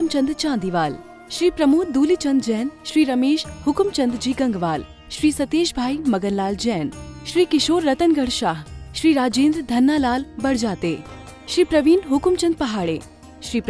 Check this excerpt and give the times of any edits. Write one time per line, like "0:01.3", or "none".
none